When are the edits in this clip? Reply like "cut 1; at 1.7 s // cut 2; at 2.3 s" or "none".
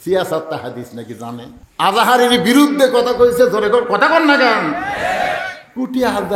cut 1; at 1.6 s